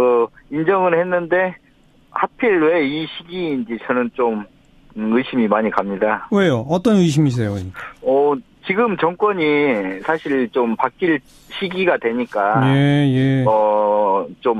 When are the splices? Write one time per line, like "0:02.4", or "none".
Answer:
none